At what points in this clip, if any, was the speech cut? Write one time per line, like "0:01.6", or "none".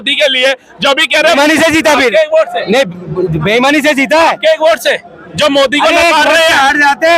0:01.4

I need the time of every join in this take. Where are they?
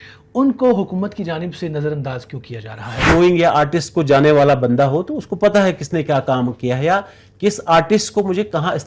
0:03.0

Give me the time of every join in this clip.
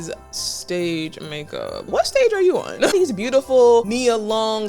0:01.8
0:02.9
0:03.9

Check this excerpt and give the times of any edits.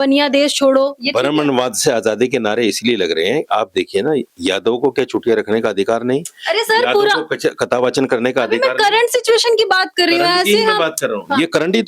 none

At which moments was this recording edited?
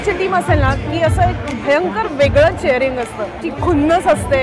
0:03.5

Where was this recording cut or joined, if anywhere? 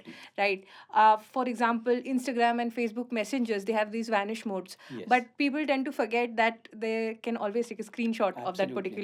none

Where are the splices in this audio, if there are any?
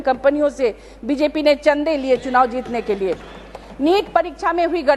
none

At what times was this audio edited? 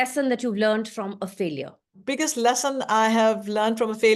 0:02.0

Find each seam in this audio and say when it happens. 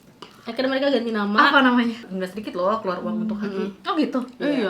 0:02.0

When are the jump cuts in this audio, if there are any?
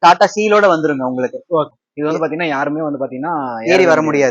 0:01.7

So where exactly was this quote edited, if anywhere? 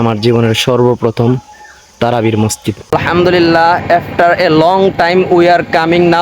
0:02.9

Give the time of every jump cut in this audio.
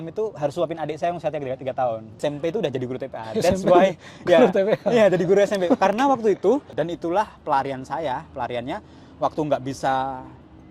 0:02.2
0:06.7

